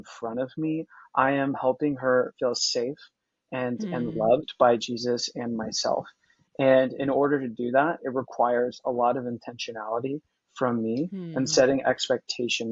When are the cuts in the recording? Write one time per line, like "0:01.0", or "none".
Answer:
none